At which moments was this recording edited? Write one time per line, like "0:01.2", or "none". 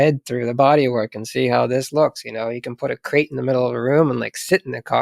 none